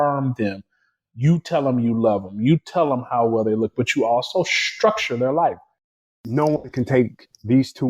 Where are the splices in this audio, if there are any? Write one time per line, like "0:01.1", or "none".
0:06.1